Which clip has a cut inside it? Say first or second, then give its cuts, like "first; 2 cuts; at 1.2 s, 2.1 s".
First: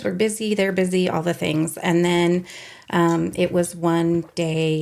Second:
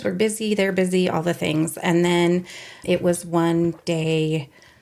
second; 1 cut; at 2.8 s